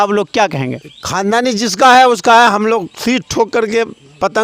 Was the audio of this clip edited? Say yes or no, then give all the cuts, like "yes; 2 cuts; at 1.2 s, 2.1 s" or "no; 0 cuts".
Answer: no; 0 cuts